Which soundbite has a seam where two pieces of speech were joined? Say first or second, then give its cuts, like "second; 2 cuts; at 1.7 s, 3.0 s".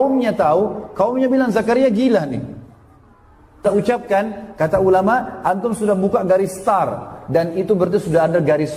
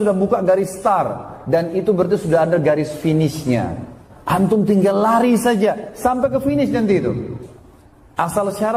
first; 1 cut; at 3.6 s